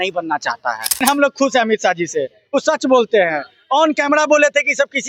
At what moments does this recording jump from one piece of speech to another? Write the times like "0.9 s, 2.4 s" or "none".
1.0 s